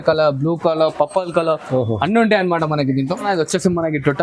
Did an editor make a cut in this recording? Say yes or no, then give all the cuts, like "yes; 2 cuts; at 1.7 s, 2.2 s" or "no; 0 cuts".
yes; 1 cut; at 3.2 s